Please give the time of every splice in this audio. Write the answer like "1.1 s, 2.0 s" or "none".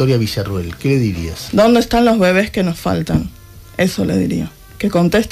1.3 s